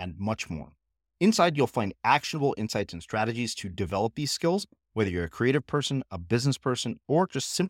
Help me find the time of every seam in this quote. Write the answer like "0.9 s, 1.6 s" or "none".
none